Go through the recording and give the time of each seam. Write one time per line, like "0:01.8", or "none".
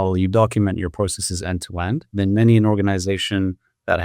0:02.1